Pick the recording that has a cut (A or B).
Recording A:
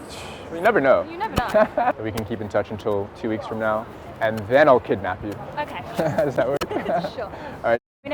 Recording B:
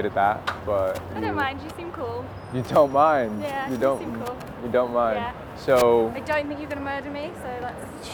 A